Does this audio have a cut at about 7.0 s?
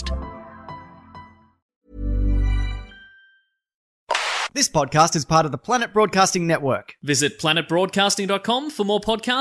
no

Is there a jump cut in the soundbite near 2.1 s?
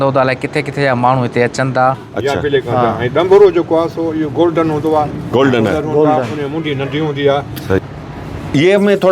yes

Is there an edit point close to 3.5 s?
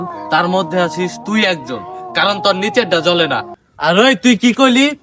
yes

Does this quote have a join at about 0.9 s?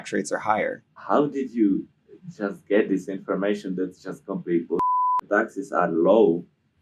yes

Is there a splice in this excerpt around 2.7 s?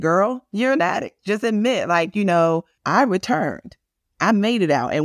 yes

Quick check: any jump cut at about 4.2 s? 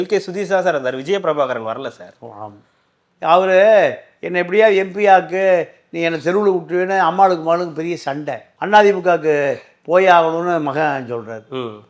no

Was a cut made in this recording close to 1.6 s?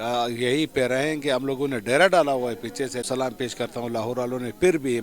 no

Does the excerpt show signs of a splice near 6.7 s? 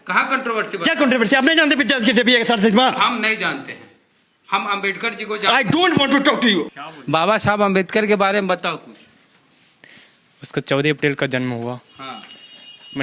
yes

